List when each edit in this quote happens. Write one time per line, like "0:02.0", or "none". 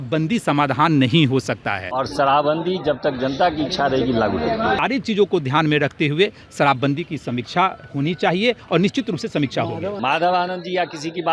0:02.0
0:04.8
0:10.0